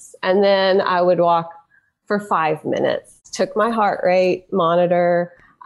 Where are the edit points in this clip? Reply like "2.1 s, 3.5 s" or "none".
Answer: 3.2 s